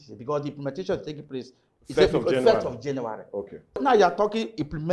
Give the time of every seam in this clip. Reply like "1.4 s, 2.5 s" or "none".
3.8 s